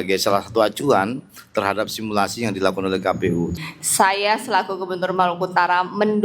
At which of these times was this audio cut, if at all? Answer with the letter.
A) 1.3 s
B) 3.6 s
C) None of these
B